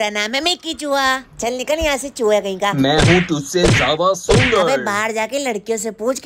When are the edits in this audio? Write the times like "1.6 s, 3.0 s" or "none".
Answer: none